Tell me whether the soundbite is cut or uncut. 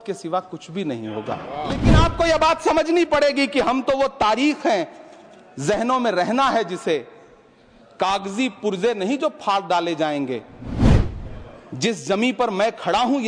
cut